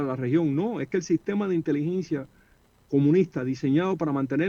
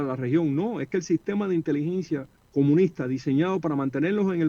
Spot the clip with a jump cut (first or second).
second